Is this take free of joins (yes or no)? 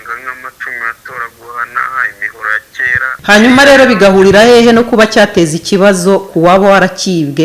no